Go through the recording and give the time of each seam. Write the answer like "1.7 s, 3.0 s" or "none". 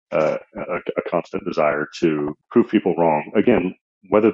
2.4 s